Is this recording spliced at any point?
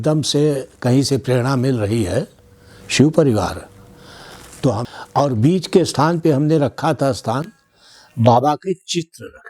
yes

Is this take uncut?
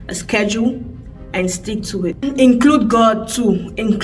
no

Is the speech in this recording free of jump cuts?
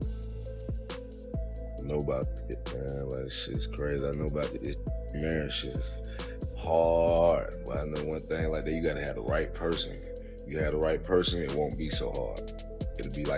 yes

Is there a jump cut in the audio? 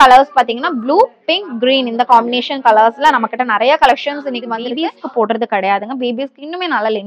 yes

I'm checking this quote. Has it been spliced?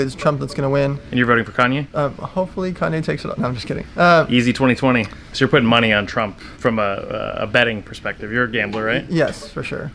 no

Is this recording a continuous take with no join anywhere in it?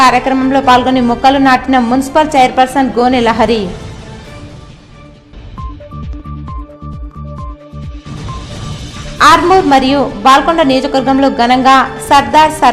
yes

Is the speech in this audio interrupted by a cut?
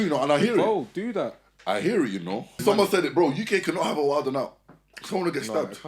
yes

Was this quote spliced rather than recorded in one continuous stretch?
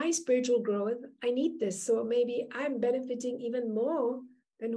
no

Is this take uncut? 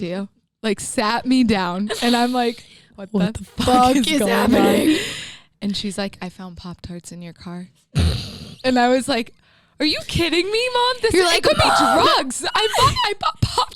yes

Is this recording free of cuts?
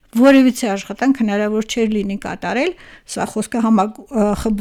yes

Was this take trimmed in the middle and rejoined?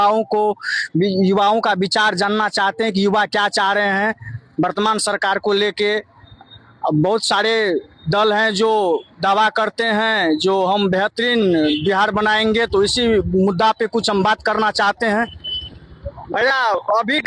yes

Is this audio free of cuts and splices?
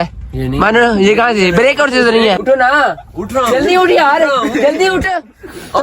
no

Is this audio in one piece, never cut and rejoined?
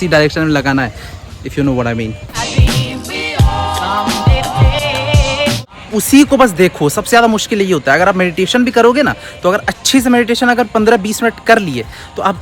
yes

